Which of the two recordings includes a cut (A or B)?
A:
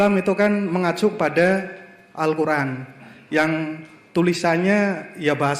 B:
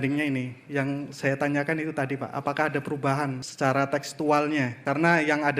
B